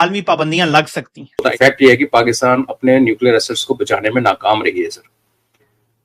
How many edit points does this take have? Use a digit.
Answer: 1